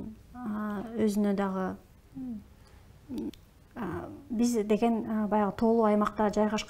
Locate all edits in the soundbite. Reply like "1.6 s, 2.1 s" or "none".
3.3 s